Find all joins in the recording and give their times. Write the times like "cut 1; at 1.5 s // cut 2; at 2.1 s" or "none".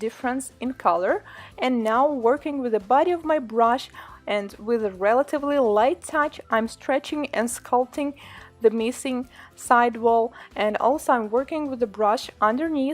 cut 1; at 9.3 s